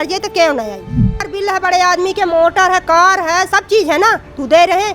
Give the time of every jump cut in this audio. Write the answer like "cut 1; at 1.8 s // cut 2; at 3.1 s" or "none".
cut 1; at 1.2 s